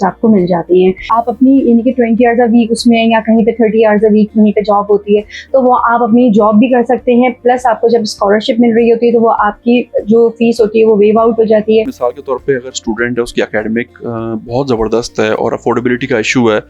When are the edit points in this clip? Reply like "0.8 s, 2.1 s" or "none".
1.1 s, 11.9 s

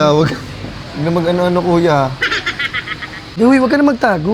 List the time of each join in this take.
3.3 s

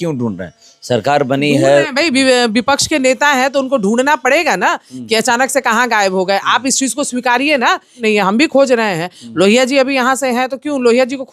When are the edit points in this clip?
8.0 s

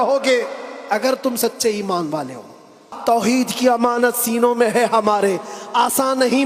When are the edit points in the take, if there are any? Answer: 2.9 s

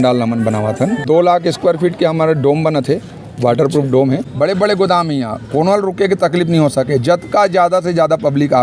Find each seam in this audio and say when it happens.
1.0 s, 4.3 s

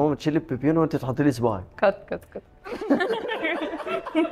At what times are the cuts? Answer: none

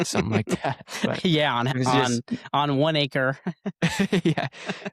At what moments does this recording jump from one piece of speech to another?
none

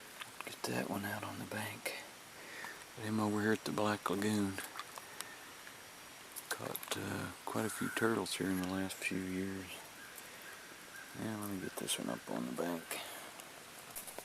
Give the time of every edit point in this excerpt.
8.3 s

